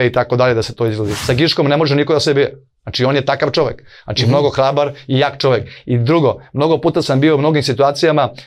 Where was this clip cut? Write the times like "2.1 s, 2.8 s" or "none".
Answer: 1.2 s